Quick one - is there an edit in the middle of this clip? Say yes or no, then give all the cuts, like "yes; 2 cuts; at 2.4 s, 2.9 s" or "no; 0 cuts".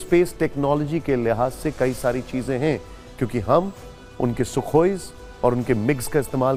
no; 0 cuts